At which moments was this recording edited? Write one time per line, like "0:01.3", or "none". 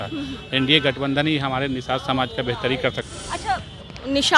0:03.1